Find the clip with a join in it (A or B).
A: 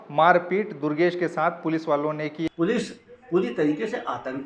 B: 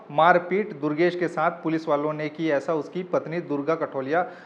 A